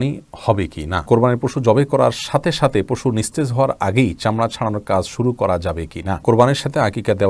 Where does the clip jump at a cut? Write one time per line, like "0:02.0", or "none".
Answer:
0:01.0
0:06.2